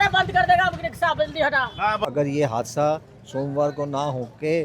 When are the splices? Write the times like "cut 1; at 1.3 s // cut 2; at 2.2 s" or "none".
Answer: cut 1; at 2.0 s